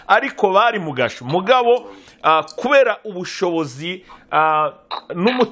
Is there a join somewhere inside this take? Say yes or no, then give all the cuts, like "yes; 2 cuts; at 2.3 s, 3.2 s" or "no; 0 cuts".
no; 0 cuts